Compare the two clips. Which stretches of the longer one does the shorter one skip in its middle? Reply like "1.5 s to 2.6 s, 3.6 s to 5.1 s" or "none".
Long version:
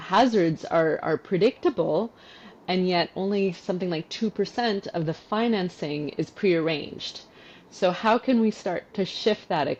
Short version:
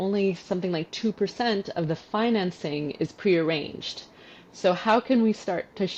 none